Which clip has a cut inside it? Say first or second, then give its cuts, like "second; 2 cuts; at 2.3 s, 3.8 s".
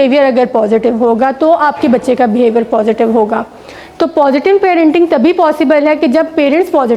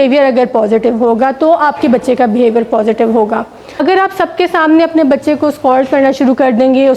second; 1 cut; at 3.6 s